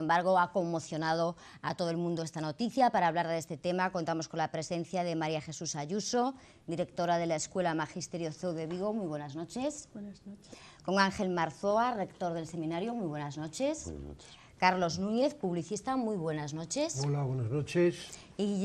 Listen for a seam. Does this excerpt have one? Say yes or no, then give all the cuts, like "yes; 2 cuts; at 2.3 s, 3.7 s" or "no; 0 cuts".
yes; 1 cut; at 15.2 s